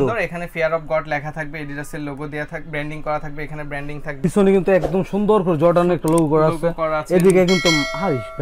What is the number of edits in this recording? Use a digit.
1